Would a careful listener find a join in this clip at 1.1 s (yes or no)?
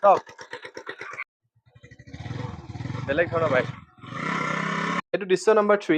yes